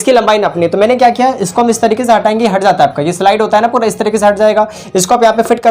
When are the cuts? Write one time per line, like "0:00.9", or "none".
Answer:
none